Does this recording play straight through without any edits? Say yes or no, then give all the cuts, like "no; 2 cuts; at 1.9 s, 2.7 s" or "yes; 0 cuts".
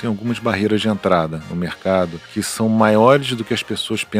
no; 1 cut; at 2.2 s